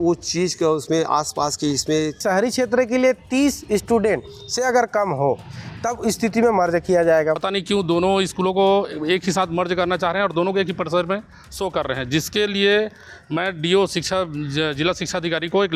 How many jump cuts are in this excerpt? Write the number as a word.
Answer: two